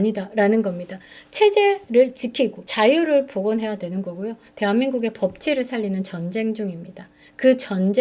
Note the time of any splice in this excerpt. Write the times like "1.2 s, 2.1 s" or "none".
2.6 s